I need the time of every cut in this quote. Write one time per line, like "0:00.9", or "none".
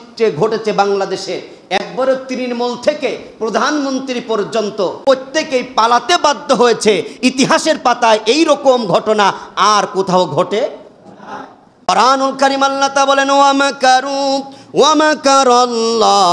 0:05.0
0:11.9